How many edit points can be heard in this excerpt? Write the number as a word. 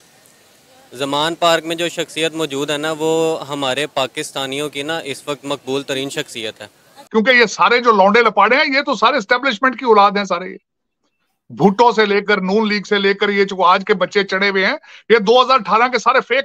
one